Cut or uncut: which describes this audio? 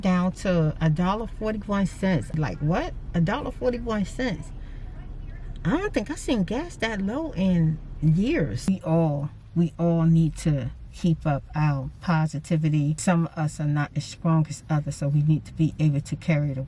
cut